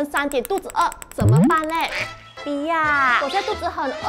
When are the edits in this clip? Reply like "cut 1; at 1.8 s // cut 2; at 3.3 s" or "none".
cut 1; at 2.4 s